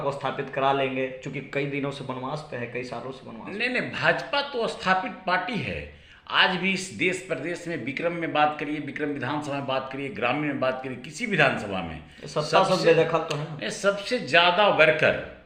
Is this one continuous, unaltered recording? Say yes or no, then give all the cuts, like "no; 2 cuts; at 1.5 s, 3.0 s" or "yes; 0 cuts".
yes; 0 cuts